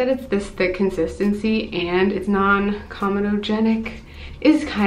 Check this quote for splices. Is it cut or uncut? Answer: uncut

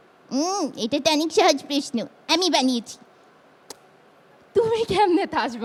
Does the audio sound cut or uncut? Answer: uncut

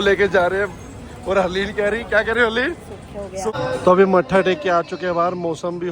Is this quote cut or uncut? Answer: cut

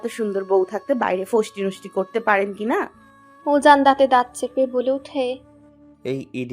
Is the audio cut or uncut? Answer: uncut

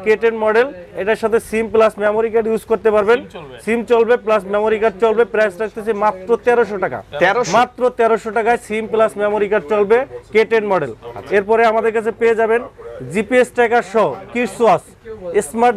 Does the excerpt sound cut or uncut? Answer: uncut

